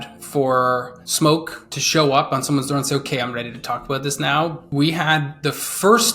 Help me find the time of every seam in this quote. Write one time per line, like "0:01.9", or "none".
0:01.0
0:04.6